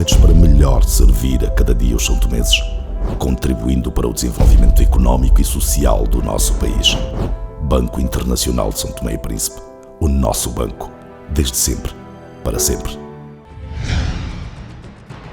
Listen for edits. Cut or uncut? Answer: cut